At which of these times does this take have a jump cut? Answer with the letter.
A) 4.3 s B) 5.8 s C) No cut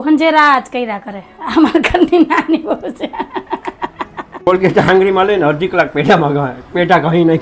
A